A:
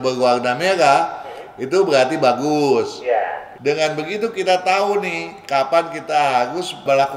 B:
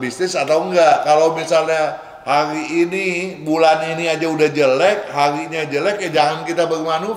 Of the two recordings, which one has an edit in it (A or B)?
A